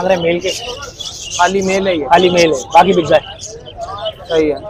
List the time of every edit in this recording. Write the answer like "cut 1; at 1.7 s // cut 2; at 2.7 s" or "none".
none